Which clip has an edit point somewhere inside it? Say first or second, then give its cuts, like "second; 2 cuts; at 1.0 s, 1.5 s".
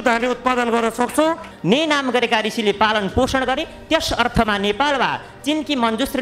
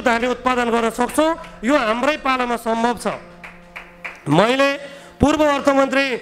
first; 1 cut; at 1.5 s